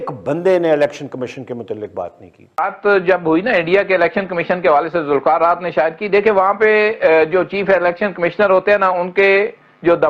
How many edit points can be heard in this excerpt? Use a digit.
1